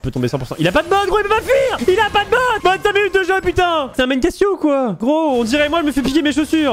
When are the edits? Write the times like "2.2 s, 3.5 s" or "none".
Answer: 1.8 s, 3.9 s, 5.0 s

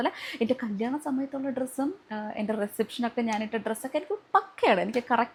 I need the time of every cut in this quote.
none

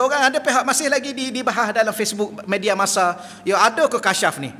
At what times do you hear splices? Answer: none

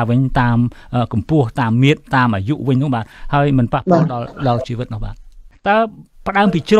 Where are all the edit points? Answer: 5.4 s

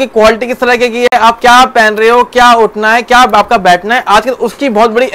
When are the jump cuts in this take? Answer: none

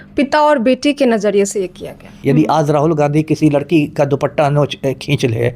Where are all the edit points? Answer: 2.1 s

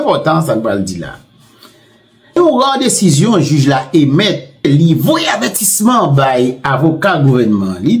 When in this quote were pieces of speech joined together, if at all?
2.4 s, 4.6 s

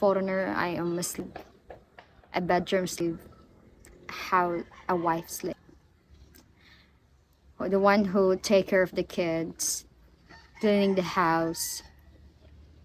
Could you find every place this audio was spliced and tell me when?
1.2 s, 3.0 s, 5.5 s

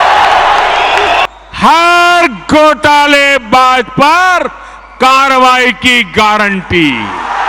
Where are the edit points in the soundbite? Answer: 1.3 s

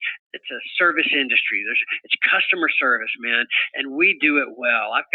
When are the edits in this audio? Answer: none

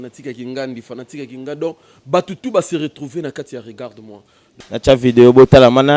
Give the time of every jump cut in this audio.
4.4 s

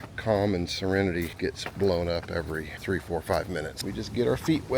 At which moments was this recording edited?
1.3 s, 2.7 s, 3.8 s

